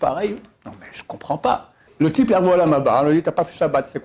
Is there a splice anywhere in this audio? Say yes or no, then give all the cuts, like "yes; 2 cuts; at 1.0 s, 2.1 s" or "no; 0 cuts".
yes; 1 cut; at 1.8 s